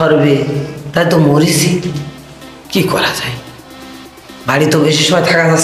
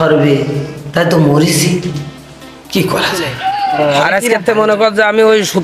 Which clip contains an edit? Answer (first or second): second